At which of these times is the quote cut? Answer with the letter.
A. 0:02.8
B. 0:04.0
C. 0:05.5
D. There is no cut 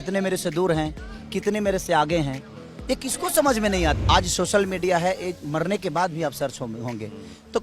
B